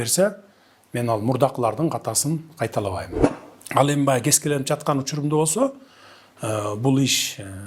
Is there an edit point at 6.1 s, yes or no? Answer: no